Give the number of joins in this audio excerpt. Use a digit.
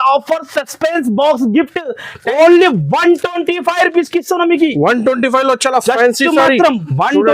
1